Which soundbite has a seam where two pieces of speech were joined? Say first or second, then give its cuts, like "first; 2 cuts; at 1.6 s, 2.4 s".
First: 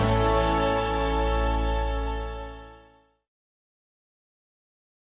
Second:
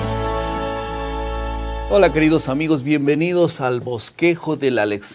second; 1 cut; at 1.8 s